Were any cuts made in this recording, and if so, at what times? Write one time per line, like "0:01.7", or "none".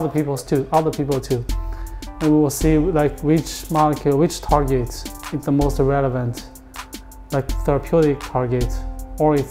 none